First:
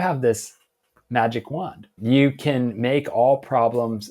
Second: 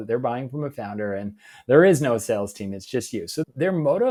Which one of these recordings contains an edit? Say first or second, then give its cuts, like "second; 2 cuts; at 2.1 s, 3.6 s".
first; 1 cut; at 1.9 s